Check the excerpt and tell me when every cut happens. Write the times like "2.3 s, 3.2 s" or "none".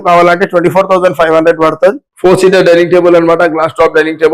2.1 s